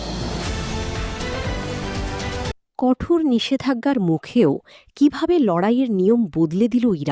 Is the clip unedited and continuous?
yes; 0 cuts

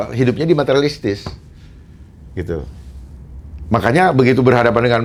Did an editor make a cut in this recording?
no; 0 cuts

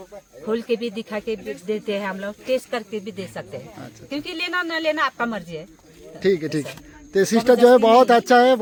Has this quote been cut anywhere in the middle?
no; 0 cuts

